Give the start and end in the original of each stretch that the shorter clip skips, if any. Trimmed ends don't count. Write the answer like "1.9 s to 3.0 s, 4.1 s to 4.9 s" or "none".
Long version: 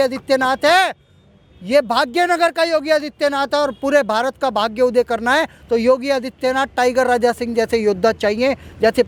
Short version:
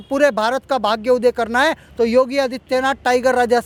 none